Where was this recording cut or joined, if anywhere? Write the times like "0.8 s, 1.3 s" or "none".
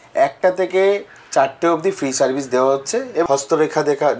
3.2 s